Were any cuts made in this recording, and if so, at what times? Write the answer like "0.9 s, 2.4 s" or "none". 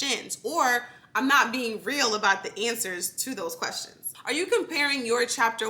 4.0 s